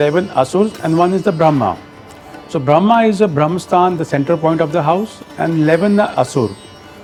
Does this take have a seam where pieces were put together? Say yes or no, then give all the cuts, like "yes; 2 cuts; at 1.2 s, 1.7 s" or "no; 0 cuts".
no; 0 cuts